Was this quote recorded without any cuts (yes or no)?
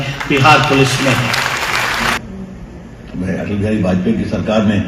no